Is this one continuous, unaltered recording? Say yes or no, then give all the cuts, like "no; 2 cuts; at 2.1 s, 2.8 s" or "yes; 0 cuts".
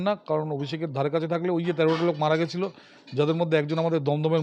yes; 0 cuts